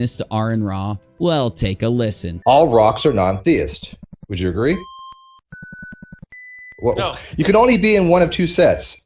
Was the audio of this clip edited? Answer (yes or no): yes